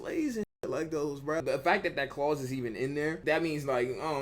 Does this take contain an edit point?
yes; 1 cut; at 1.4 s

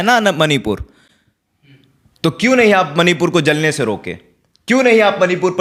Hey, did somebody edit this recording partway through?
no; 0 cuts

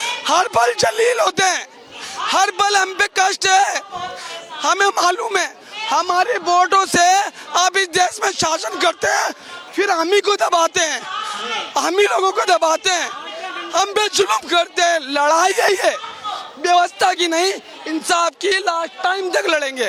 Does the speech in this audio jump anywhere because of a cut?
no; 0 cuts

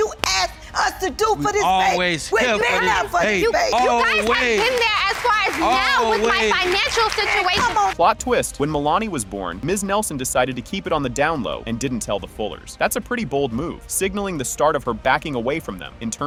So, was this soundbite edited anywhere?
no; 0 cuts

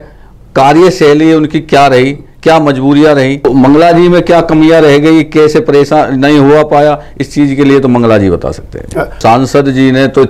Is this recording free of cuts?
no; 2 cuts; at 3.5 s, 9.2 s

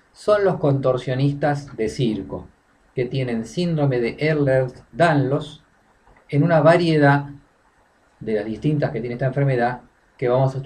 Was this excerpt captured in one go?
no; 1 cut; at 5.7 s

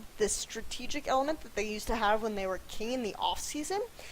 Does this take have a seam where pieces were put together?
yes; 1 cut; at 3.2 s

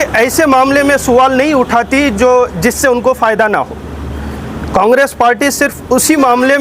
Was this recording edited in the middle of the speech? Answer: no; 0 cuts

